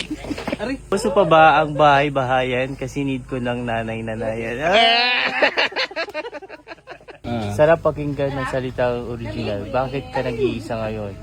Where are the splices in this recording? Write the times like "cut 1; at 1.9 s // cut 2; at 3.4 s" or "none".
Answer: cut 1; at 0.9 s // cut 2; at 7.2 s